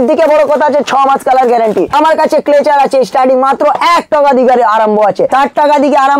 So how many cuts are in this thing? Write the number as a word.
two